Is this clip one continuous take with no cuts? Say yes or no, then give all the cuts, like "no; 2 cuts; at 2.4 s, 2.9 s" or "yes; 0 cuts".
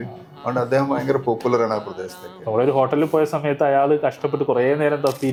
yes; 0 cuts